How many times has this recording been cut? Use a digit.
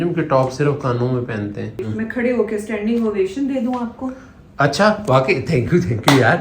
1